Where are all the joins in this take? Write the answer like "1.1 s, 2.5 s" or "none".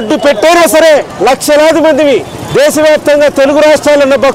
1.1 s